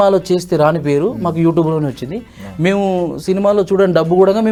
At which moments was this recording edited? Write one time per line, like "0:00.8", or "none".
none